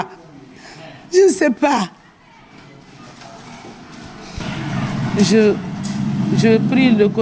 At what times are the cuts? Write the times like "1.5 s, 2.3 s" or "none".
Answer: 4.4 s